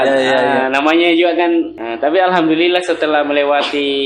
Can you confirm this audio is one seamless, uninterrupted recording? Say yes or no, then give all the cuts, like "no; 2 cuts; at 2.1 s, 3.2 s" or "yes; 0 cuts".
no; 1 cut; at 1.8 s